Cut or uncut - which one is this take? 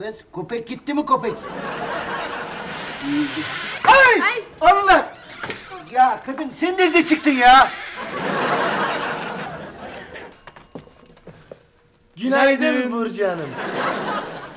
cut